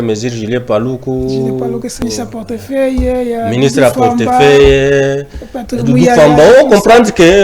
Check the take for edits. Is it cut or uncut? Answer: cut